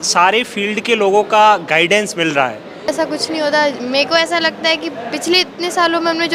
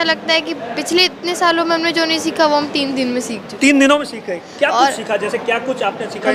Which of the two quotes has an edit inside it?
first; 1 cut; at 2.9 s

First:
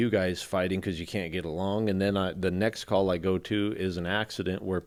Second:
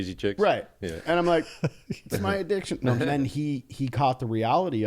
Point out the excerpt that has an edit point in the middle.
second; 1 cut; at 3.1 s

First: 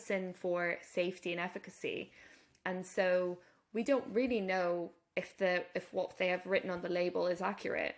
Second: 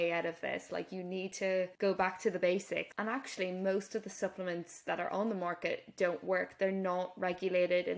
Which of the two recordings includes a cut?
second; 2 cuts; at 1.7 s, 2.9 s

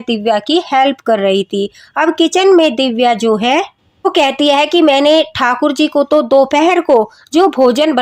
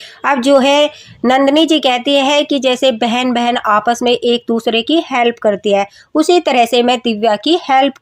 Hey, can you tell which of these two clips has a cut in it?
first; 1 cut; at 4.1 s

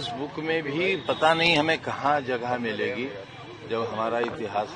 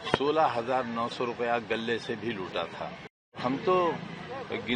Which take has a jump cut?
second; 1 cut; at 3.4 s

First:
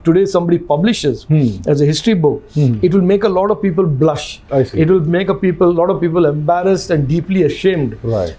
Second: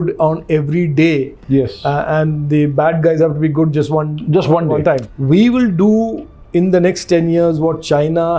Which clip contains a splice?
second; 1 cut; at 5.1 s

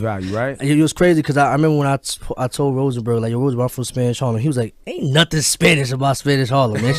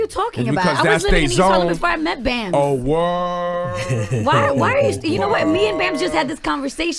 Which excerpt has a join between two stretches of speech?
second; 1 cut; at 3.0 s

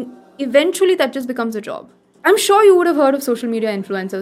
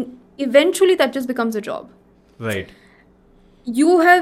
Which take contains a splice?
first; 1 cut; at 2.0 s

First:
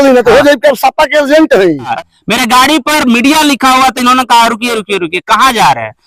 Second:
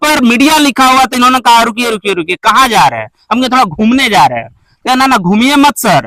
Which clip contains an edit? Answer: first; 1 cut; at 1.9 s

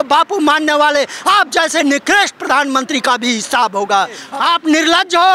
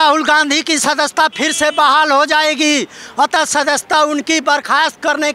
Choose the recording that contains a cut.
first; 1 cut; at 4.2 s

